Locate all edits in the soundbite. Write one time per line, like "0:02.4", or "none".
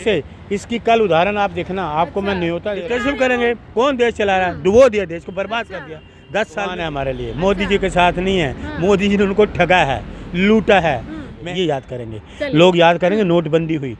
0:02.7
0:06.8
0:11.3